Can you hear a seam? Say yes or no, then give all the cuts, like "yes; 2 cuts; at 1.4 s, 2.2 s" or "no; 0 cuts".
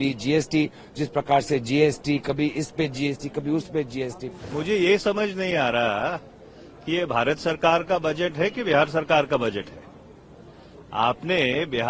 yes; 1 cut; at 4.3 s